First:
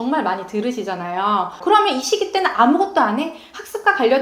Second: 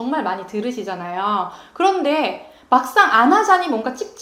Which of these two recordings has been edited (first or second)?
first